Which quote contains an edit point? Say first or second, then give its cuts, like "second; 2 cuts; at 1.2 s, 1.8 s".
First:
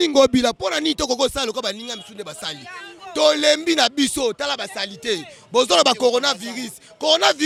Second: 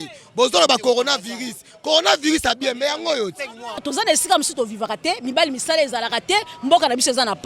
second; 1 cut; at 3.8 s